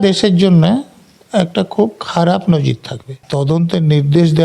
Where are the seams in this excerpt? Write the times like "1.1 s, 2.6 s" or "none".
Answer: 3.2 s